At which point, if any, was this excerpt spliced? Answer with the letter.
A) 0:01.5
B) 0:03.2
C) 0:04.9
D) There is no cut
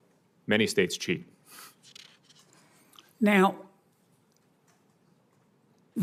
D